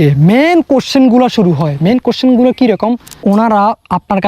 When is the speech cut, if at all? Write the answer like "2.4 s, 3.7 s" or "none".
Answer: 3.2 s